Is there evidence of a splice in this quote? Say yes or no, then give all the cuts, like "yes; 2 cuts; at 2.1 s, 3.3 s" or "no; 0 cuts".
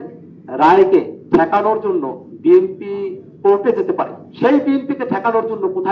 yes; 4 cuts; at 1.2 s, 2.2 s, 3.2 s, 4.2 s